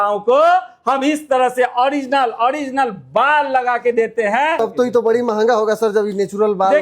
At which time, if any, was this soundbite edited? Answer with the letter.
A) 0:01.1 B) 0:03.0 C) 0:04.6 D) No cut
C